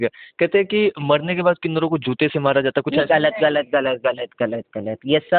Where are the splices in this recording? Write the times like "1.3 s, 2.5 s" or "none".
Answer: none